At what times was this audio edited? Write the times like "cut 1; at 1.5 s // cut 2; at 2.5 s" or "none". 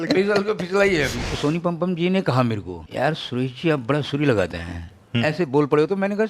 cut 1; at 1.2 s // cut 2; at 2.8 s